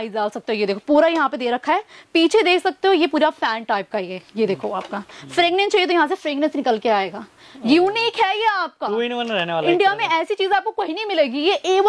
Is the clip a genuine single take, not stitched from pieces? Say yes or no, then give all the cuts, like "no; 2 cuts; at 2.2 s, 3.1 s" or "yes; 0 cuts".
yes; 0 cuts